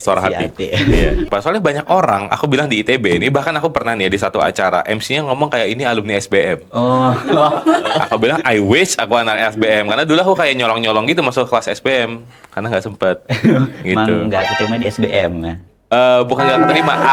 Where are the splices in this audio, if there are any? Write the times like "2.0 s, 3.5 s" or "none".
1.3 s